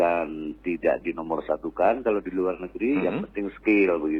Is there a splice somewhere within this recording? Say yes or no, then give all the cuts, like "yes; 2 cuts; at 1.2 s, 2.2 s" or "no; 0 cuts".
no; 0 cuts